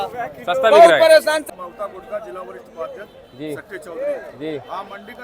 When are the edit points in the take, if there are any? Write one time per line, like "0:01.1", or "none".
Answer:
0:01.4